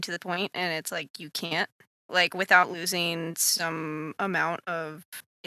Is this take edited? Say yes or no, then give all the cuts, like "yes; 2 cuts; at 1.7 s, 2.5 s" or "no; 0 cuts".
yes; 1 cut; at 2.0 s